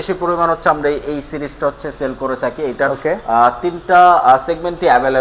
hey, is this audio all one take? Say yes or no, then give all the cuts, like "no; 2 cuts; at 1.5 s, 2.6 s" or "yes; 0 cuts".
yes; 0 cuts